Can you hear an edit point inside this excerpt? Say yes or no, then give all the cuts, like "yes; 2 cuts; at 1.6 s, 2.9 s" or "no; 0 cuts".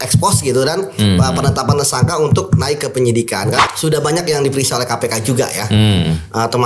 yes; 1 cut; at 3.6 s